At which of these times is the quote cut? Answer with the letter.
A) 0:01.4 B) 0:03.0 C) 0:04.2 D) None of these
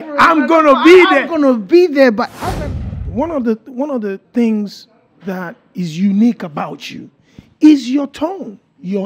B